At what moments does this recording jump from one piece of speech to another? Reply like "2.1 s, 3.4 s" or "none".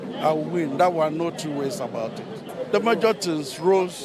none